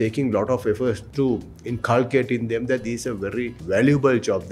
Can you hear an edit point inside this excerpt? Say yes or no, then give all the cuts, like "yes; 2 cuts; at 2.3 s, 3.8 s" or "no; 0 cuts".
yes; 2 cuts; at 1.0 s, 3.6 s